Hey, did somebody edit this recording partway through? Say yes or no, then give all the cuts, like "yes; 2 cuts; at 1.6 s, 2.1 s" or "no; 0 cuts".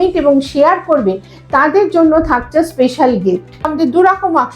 yes; 1 cut; at 3.6 s